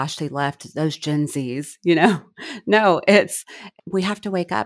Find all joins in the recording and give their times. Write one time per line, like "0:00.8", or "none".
0:03.6